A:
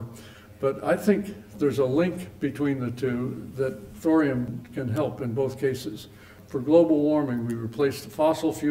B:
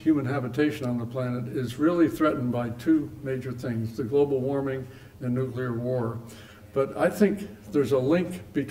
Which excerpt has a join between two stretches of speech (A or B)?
A